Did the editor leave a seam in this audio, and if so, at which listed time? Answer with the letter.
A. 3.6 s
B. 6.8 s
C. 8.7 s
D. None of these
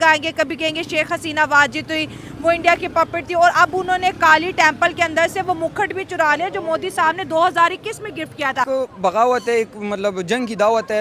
C